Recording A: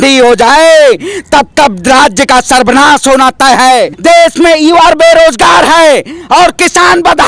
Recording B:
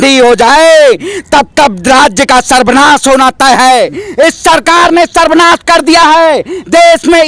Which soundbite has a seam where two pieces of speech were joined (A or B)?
A